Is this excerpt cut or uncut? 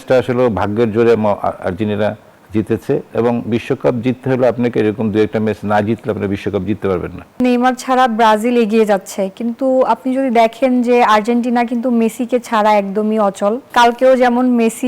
cut